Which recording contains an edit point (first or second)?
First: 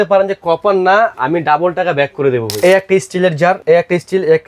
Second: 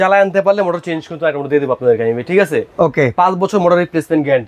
first